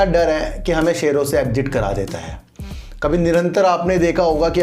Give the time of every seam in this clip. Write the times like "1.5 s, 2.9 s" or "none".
none